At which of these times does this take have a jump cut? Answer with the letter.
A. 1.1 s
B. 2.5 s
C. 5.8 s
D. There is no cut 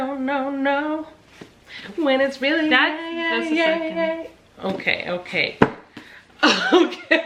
D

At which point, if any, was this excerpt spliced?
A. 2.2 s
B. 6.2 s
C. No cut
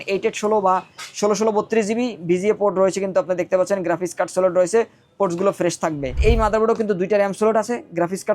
B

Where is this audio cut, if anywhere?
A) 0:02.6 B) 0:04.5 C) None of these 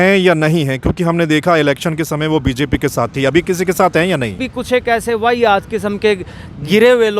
B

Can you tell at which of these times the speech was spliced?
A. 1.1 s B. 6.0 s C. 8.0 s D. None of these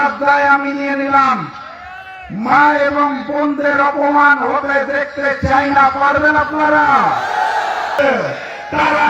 C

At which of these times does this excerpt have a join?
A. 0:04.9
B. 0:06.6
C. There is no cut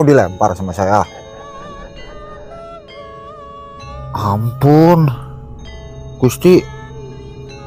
B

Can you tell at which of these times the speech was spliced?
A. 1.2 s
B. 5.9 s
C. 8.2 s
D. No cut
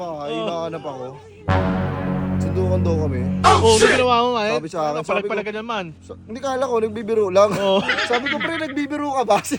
D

